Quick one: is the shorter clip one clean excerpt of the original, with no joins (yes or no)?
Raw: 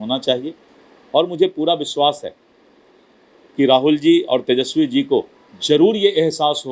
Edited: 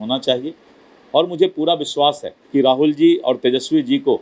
no